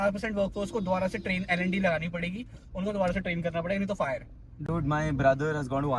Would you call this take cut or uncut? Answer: uncut